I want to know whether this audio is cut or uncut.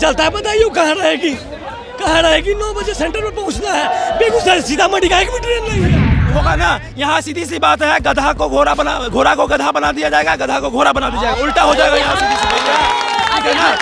cut